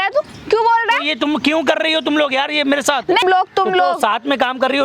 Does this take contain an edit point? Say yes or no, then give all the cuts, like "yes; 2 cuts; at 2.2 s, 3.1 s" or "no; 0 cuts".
yes; 1 cut; at 3.2 s